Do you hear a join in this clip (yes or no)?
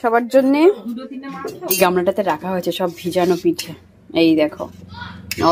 yes